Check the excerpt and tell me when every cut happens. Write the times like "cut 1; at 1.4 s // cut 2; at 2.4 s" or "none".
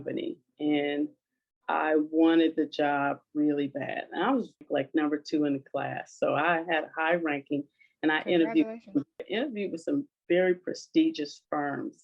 cut 1; at 4.7 s // cut 2; at 9.3 s